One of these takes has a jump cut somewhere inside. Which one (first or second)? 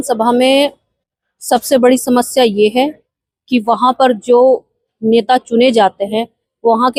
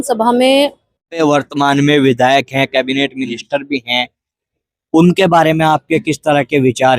second